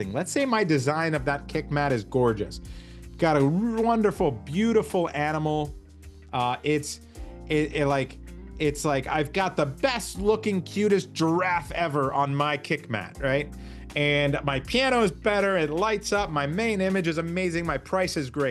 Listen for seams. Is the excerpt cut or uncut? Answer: uncut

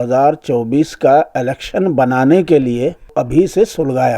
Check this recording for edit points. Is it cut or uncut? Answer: cut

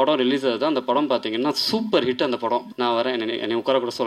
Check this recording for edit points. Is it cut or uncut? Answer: cut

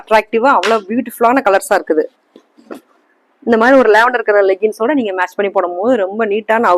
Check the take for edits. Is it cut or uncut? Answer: uncut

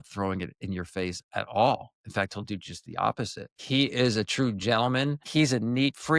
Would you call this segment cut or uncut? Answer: cut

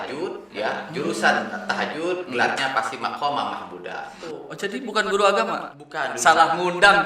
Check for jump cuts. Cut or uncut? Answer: cut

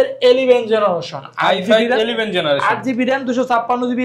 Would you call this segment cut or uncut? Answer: uncut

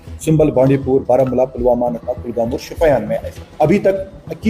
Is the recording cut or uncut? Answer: cut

